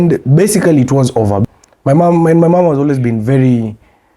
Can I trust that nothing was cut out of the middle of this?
no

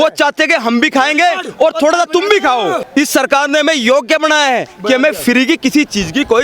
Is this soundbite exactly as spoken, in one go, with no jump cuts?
no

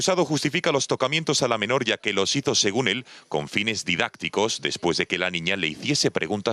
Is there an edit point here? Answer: no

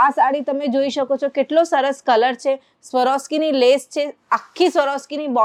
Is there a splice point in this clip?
no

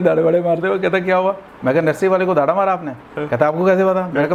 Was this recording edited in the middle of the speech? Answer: no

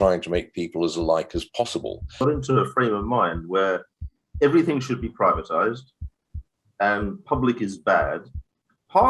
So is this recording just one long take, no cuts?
no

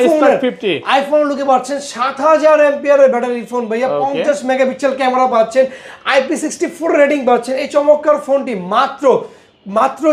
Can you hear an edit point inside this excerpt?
no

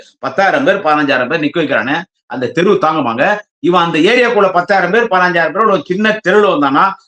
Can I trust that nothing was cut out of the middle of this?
yes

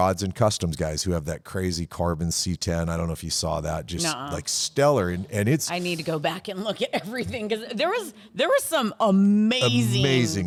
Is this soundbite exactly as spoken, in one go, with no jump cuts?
yes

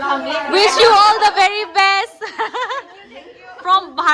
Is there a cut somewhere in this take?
no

